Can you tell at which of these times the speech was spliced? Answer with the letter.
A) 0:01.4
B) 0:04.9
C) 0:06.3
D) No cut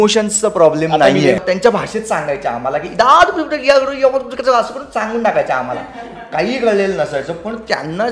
A